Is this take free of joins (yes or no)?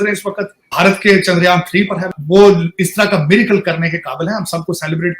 yes